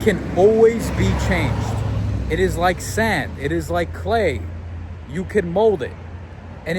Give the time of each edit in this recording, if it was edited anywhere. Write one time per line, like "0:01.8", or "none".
none

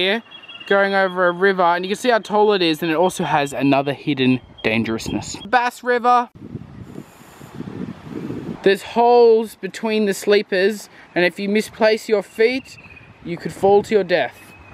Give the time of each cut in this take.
none

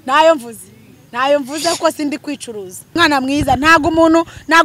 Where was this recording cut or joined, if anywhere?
0:03.0

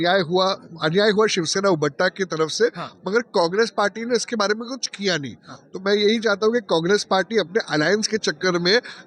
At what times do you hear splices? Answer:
none

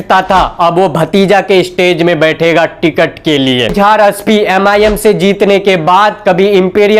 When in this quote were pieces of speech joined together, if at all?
0:03.7

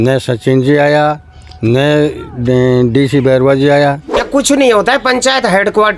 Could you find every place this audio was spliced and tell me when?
0:04.2

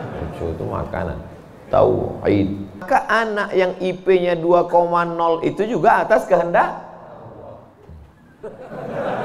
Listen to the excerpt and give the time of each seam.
0:02.8

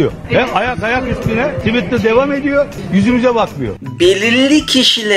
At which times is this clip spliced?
0:01.6
0:02.8
0:03.7

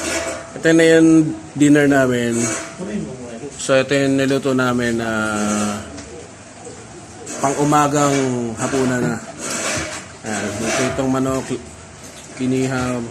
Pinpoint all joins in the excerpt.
none

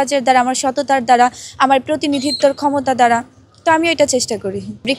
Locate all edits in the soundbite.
none

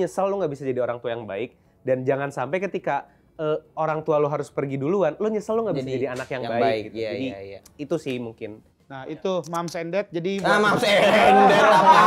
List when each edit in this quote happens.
none

